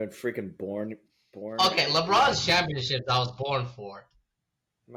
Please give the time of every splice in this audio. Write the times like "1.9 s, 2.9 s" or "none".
none